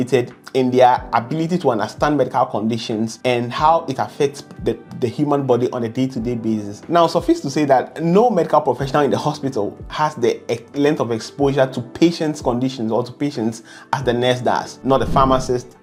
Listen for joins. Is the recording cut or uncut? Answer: uncut